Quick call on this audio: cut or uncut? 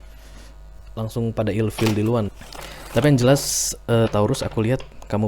cut